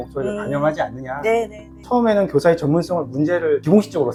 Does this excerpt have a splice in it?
no; 0 cuts

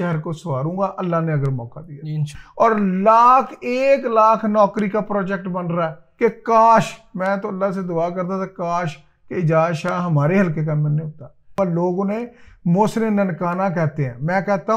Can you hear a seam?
yes; 3 cuts; at 2.3 s, 6.0 s, 11.5 s

